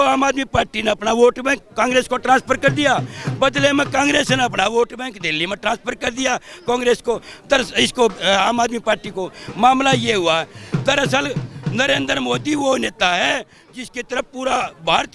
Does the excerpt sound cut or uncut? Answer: uncut